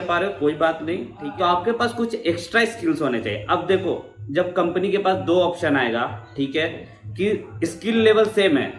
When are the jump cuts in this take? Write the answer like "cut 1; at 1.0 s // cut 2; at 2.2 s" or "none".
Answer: cut 1; at 1.2 s